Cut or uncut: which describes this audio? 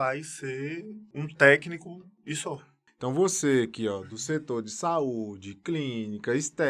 cut